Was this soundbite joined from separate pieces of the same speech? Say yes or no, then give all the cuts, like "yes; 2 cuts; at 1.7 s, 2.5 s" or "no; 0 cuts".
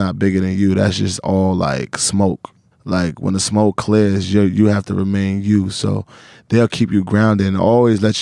yes; 1 cut; at 2.6 s